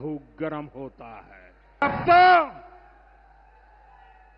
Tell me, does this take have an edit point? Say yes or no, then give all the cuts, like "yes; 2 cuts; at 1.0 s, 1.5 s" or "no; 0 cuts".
yes; 1 cut; at 1.8 s